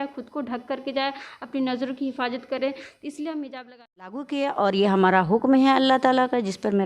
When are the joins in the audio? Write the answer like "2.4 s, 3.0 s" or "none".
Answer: 4.3 s